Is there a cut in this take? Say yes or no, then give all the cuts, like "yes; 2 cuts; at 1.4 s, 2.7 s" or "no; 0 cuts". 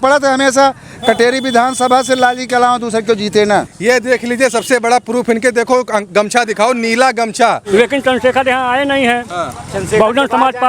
yes; 2 cuts; at 3.7 s, 7.6 s